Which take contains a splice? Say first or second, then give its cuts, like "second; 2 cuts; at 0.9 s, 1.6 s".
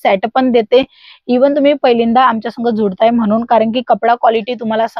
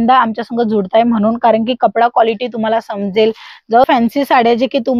second; 1 cut; at 3.8 s